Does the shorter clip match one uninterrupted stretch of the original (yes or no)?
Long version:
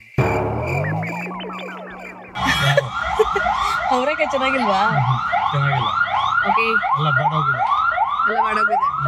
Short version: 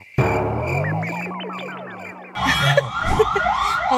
yes